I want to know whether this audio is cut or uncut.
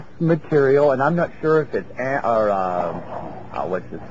cut